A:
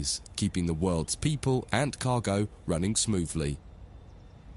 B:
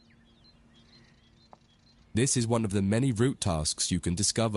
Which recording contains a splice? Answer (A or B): A